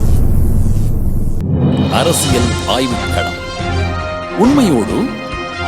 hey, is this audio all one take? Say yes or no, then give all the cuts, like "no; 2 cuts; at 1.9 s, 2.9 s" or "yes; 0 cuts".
no; 1 cut; at 1.4 s